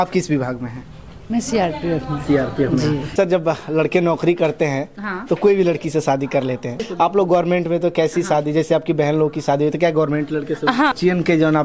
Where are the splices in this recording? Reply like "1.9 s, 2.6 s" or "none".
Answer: 3.1 s, 6.8 s, 10.9 s